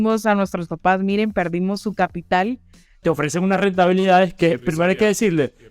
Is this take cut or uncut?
cut